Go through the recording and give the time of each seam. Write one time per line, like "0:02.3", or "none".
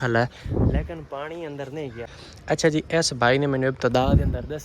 0:02.2